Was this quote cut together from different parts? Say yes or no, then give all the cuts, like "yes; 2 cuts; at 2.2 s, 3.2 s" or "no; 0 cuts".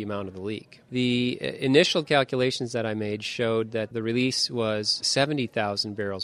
yes; 3 cuts; at 0.8 s, 3.9 s, 5.0 s